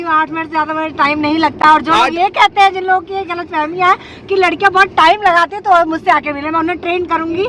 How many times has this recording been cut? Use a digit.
1